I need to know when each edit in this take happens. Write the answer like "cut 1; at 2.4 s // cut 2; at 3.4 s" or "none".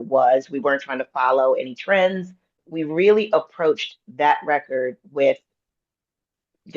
cut 1; at 2.6 s

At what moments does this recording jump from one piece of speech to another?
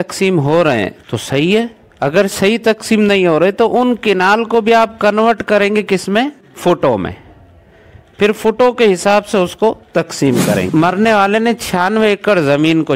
cut 1; at 10.7 s

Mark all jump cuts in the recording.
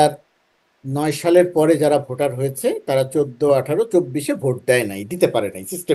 none

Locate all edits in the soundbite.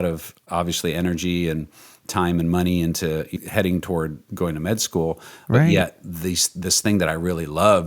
cut 1; at 3.3 s // cut 2; at 4.2 s

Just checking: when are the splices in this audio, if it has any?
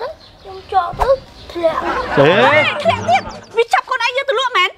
cut 1; at 1.4 s // cut 2; at 3.4 s

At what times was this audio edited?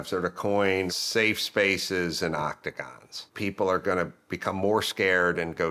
cut 1; at 0.9 s // cut 2; at 3.2 s

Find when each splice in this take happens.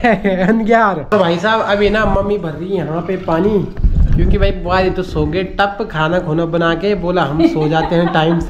cut 1; at 1.1 s

